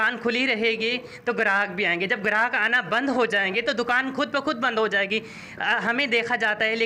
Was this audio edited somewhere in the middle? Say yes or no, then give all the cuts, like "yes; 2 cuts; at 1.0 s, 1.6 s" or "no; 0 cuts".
no; 0 cuts